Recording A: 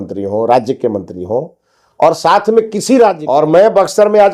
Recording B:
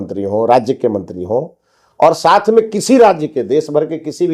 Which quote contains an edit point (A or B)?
A